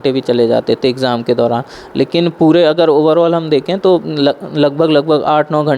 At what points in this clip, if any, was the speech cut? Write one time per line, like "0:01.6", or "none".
none